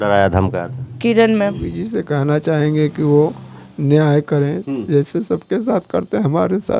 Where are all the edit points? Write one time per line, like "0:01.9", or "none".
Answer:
0:01.7